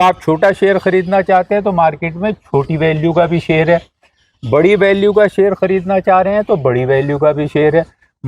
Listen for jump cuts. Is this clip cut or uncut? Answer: uncut